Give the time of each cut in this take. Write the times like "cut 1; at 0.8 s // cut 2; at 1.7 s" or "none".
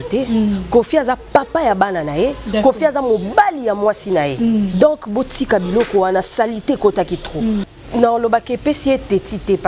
cut 1; at 7.7 s